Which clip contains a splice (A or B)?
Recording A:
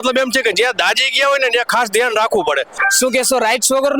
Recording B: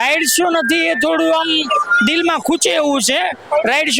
A